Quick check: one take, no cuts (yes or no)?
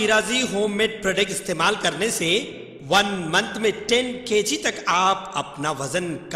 yes